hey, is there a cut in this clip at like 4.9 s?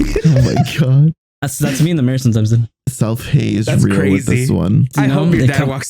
yes; 1 cut; at 4.9 s

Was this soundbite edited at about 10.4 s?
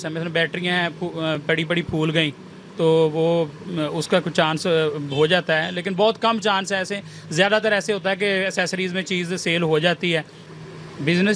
yes; 1 cut; at 10.4 s

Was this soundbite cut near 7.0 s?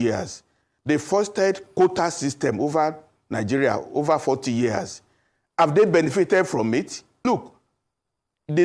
yes; 1 cut; at 7.0 s

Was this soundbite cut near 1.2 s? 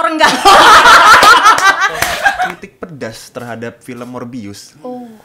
no; 1 cut; at 2.6 s

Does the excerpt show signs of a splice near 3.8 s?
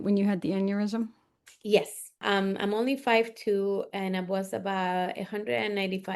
no; 1 cut; at 2.2 s

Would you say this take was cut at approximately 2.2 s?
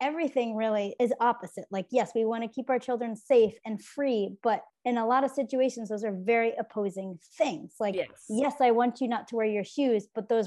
no; 1 cut; at 0.9 s

